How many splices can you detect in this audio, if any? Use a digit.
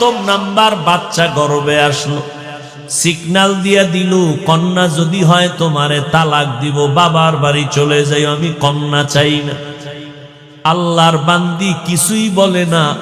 0